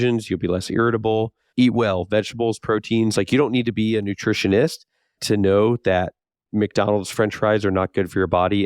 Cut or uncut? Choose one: cut